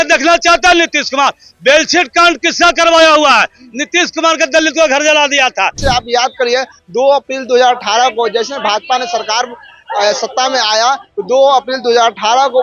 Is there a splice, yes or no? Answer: yes